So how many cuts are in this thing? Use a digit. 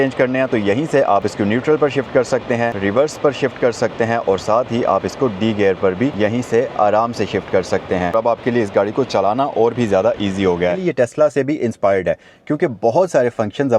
5